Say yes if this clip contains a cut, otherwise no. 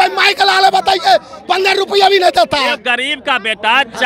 no